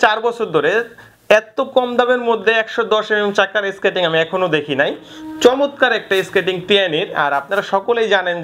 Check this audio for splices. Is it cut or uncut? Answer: uncut